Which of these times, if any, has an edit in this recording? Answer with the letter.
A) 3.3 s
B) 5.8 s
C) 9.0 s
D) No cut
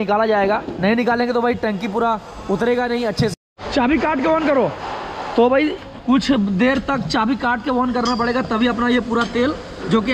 A